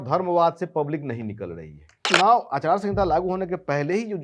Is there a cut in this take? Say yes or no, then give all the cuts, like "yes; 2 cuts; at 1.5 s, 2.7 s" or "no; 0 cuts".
yes; 1 cut; at 2.0 s